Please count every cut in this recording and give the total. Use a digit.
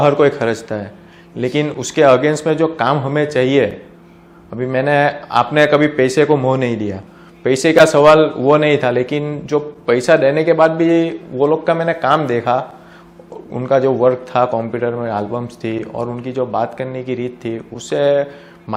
0